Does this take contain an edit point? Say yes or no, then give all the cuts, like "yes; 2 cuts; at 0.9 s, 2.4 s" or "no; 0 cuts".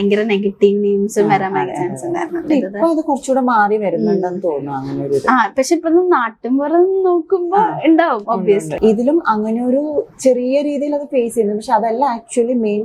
yes; 2 cuts; at 2.5 s, 8.7 s